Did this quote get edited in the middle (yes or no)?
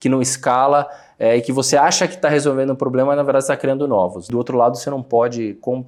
no